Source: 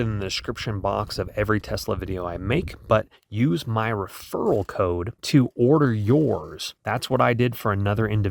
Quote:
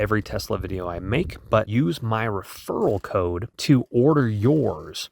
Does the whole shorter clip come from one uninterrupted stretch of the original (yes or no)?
no